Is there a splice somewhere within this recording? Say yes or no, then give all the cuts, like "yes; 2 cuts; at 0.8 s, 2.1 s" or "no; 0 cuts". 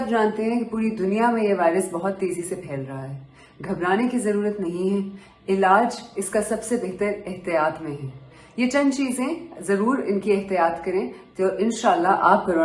no; 0 cuts